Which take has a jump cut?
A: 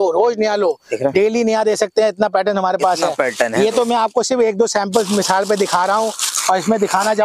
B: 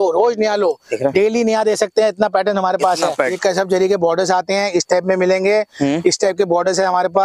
B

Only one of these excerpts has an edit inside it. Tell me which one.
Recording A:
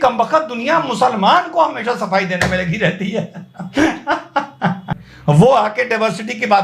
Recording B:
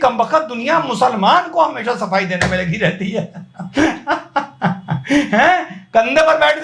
A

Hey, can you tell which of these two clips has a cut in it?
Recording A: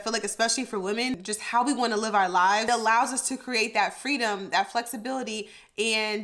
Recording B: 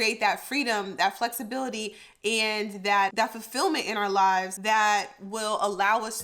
A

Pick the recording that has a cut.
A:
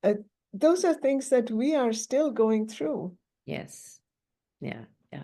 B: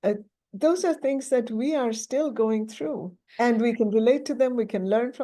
B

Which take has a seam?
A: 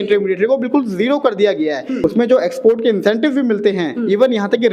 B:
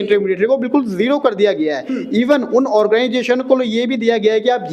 A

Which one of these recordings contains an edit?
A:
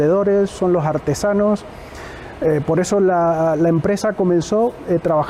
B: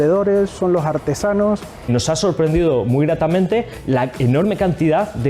B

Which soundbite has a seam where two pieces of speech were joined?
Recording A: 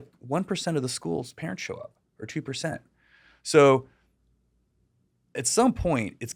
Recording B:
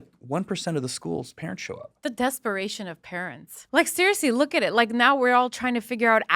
B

